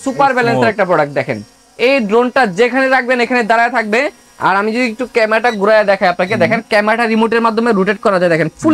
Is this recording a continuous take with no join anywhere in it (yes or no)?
yes